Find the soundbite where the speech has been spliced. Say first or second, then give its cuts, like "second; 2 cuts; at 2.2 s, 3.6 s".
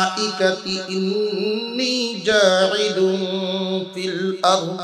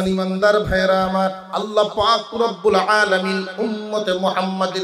second; 1 cut; at 1.4 s